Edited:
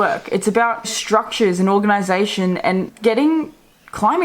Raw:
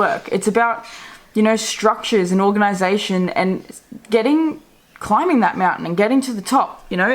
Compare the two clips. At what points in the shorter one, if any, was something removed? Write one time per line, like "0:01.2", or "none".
0:01.0
0:02.9